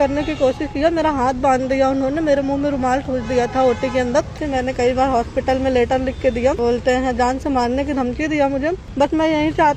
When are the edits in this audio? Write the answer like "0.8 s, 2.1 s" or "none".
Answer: 4.4 s, 8.8 s

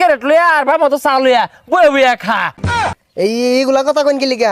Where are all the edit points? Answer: 2.9 s

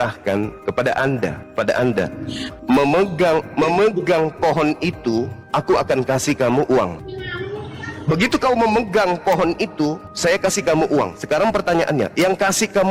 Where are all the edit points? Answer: none

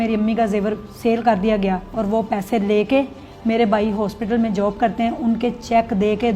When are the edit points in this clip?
none

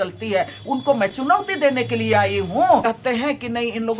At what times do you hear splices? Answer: 2.8 s

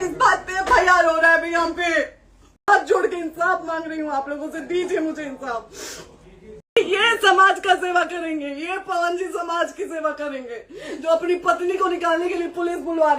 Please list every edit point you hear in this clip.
2.7 s, 6.8 s

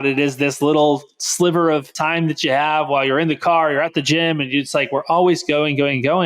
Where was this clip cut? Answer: 1.9 s

